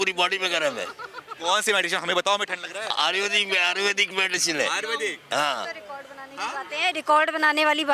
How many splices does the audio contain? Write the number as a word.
zero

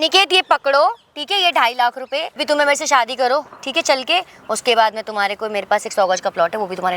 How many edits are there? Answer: one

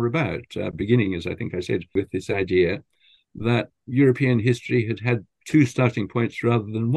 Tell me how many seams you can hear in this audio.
three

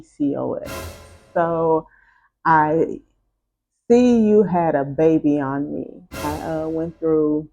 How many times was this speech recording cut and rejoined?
two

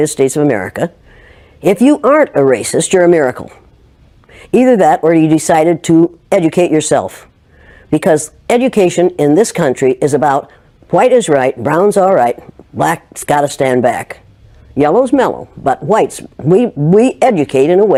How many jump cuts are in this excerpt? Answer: zero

